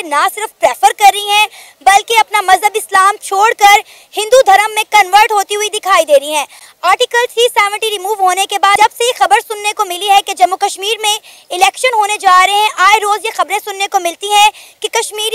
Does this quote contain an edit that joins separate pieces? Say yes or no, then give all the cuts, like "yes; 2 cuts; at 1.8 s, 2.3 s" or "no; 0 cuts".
no; 0 cuts